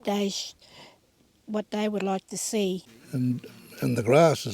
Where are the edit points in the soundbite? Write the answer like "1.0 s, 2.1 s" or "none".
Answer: 3.0 s